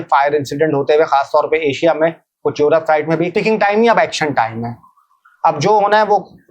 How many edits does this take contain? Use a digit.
1